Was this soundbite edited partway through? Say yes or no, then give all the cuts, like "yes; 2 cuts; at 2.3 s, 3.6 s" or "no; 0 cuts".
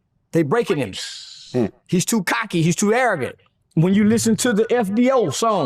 yes; 1 cut; at 3.3 s